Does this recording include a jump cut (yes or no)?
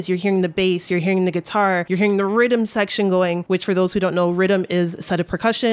yes